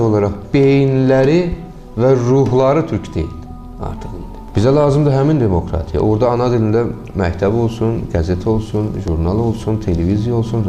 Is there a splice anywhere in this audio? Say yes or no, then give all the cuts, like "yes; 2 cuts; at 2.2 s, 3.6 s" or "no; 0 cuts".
yes; 1 cut; at 4.4 s